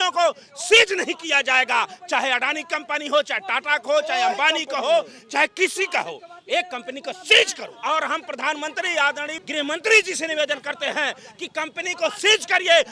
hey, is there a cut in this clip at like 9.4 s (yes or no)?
yes